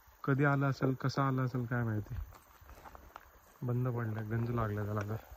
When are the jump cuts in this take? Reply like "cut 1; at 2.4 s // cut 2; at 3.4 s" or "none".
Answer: none